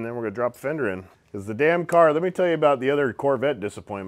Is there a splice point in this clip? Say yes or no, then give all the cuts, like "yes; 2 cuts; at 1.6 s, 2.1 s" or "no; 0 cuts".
yes; 1 cut; at 1.1 s